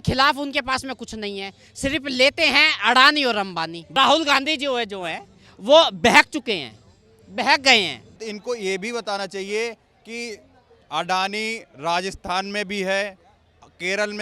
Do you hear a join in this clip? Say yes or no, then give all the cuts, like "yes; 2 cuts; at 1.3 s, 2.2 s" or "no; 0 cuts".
yes; 2 cuts; at 3.8 s, 8.2 s